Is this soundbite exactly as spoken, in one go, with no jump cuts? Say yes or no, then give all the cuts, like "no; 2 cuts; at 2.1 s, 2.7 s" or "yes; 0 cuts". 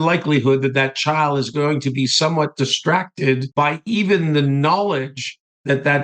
no; 1 cut; at 3.5 s